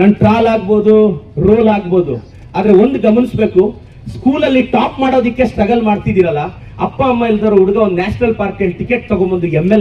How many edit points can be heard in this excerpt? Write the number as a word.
zero